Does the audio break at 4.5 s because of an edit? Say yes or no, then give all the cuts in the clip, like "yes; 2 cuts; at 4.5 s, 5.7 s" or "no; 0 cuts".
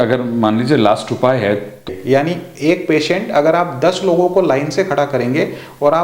no; 1 cut; at 1.9 s